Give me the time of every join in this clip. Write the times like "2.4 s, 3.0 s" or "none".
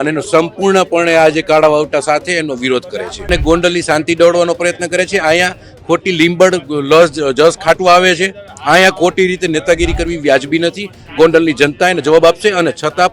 3.3 s